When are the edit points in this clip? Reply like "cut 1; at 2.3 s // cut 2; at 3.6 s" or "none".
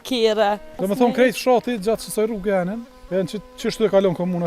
cut 1; at 0.8 s // cut 2; at 2.9 s